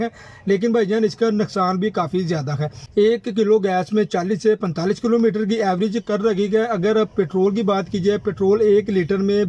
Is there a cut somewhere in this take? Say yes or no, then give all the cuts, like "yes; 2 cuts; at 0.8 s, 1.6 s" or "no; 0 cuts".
no; 0 cuts